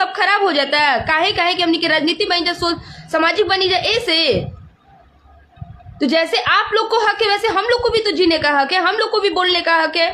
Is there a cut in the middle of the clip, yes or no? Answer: no